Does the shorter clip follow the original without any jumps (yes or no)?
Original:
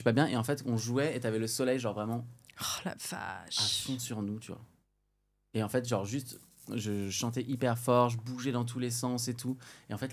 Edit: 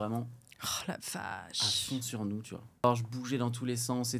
no